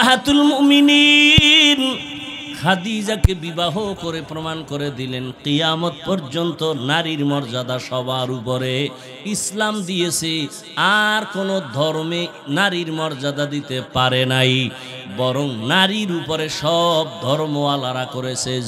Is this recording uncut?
yes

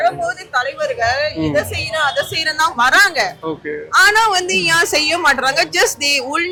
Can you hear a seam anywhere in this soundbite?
no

